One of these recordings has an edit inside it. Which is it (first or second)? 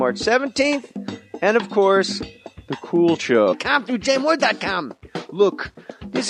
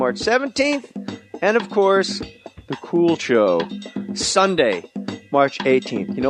second